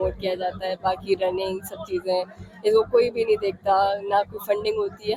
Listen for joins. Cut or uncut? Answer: uncut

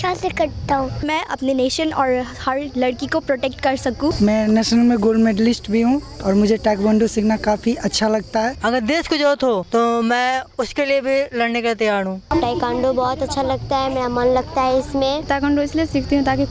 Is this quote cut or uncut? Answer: cut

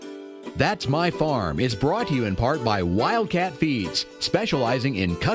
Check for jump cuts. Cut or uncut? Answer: uncut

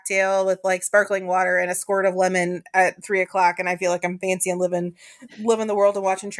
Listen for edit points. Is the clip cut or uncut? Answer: uncut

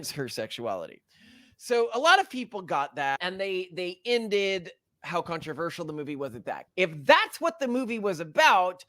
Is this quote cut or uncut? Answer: cut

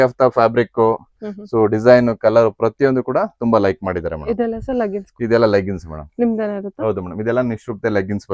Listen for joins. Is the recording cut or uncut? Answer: uncut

